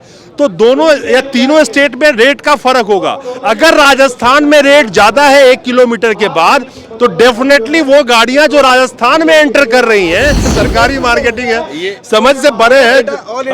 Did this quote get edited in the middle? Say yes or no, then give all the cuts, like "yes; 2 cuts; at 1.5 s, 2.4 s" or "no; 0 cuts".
yes; 1 cut; at 10.6 s